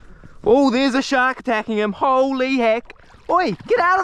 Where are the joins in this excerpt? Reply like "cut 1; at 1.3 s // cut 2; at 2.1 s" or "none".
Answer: none